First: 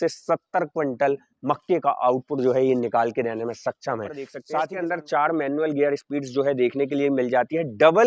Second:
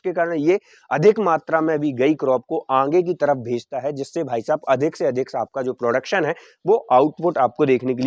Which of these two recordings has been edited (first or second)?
first